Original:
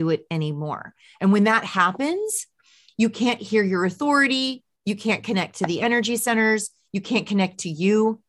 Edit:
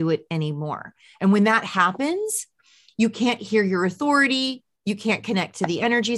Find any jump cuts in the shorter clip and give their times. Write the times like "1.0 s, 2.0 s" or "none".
none